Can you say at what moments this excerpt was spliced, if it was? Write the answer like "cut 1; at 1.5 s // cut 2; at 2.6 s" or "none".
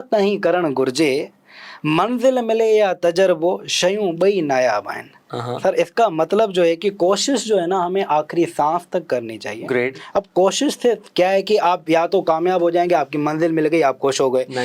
none